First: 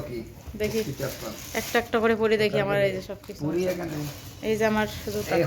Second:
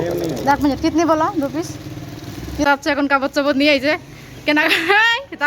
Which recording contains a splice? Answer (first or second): second